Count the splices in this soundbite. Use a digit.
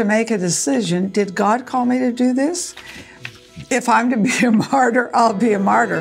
0